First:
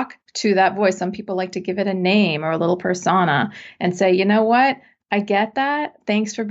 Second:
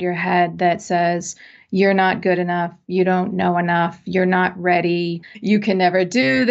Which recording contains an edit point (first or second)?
second